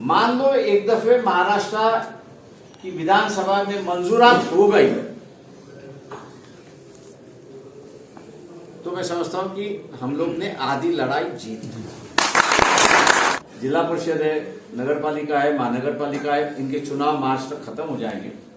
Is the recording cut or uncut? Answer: cut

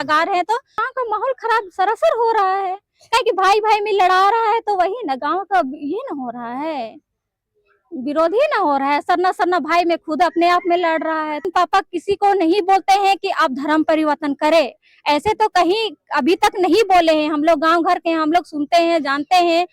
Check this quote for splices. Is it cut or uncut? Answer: cut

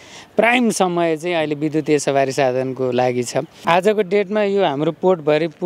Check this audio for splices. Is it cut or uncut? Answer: cut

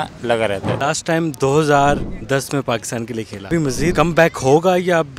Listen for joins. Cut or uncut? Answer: cut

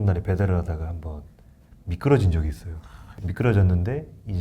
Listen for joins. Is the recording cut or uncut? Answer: cut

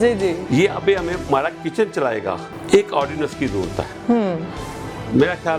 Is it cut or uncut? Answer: cut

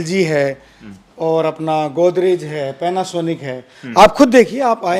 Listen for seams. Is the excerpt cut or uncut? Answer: uncut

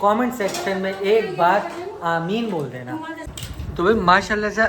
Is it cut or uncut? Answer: cut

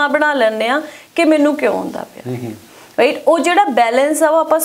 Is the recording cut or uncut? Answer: uncut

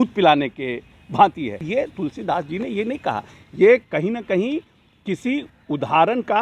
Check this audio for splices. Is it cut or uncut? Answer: cut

